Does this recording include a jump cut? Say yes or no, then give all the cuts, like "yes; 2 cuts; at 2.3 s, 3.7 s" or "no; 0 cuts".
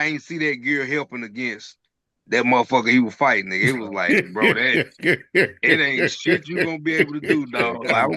no; 0 cuts